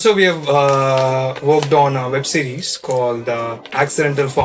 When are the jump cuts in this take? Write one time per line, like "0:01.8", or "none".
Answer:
none